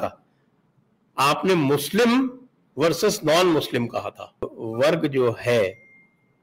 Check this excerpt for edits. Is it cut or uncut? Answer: cut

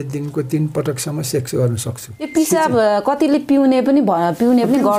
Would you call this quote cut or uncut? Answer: cut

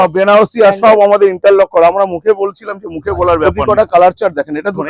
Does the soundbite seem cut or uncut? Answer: cut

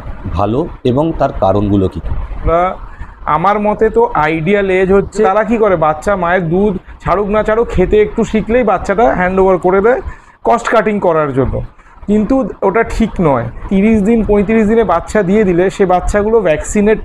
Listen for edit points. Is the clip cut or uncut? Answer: cut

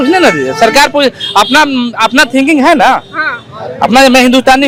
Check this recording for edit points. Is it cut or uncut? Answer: uncut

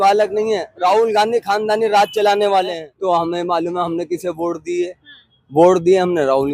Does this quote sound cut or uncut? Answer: cut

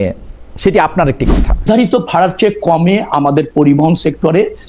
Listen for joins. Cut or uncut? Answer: cut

